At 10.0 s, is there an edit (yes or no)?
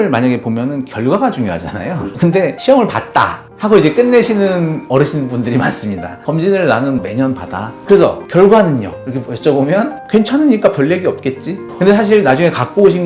no